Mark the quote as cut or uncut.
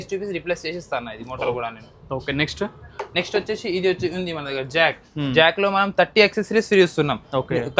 uncut